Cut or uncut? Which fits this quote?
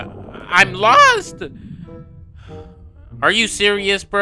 uncut